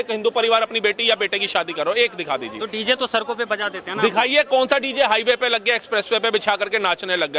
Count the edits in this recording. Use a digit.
0